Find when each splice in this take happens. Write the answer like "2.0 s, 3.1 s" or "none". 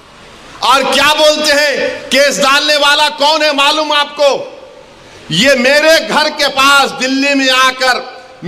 none

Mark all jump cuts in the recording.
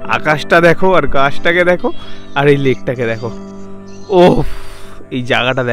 none

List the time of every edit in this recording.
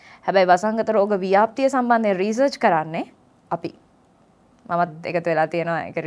none

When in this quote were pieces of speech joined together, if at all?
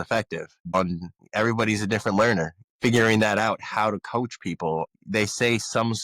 0.8 s, 2.7 s

